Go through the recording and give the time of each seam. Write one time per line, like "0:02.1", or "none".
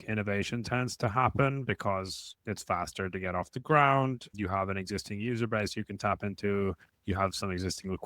0:02.4
0:04.3